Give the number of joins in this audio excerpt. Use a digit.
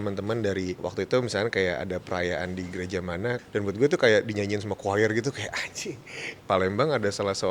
3